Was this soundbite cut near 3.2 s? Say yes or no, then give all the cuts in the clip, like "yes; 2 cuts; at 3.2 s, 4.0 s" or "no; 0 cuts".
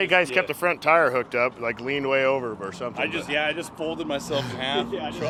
no; 0 cuts